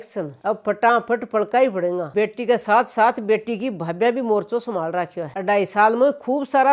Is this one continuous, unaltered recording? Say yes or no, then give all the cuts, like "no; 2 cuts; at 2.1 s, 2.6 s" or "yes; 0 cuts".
no; 2 cuts; at 2.1 s, 5.3 s